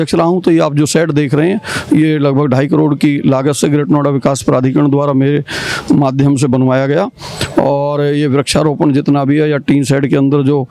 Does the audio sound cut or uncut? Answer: uncut